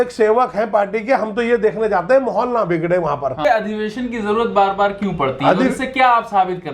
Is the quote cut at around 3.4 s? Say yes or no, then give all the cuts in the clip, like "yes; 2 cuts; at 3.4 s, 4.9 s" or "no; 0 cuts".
yes; 1 cut; at 3.4 s